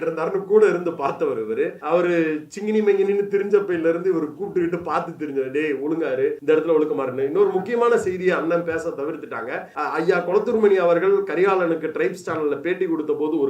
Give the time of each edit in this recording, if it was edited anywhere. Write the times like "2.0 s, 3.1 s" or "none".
1.8 s, 6.4 s, 9.7 s